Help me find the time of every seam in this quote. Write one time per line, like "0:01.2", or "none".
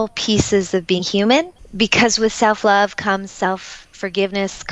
0:01.6